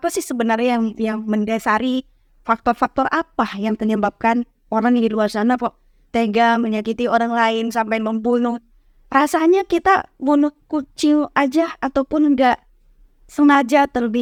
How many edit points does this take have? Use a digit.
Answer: 0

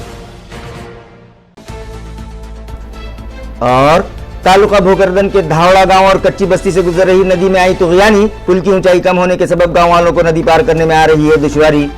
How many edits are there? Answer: 1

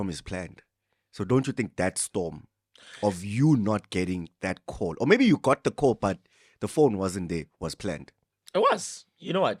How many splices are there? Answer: 0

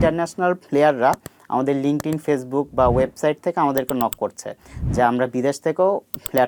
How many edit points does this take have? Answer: 0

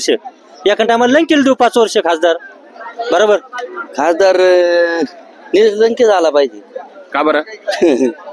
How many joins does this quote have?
1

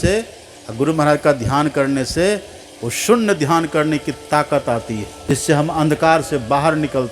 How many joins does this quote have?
1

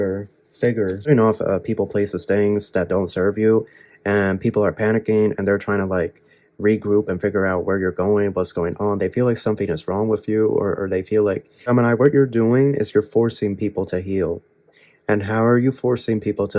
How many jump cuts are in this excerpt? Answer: 2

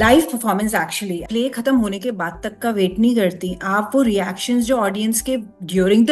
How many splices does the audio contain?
1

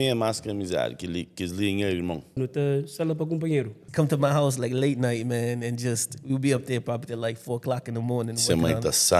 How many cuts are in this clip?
2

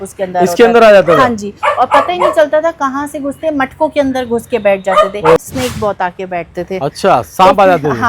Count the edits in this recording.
1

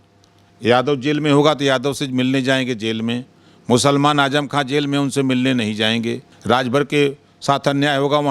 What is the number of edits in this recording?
1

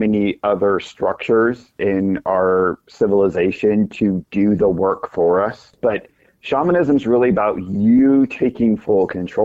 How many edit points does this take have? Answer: 1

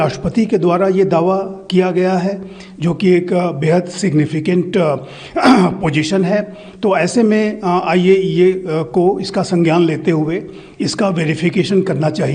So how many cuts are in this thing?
0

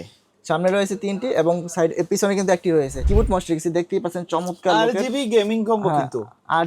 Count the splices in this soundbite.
1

